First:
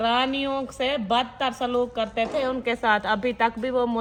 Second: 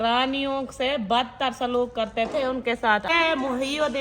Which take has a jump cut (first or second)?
second